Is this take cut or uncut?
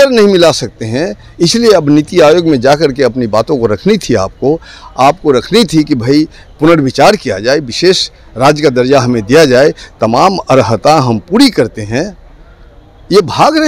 uncut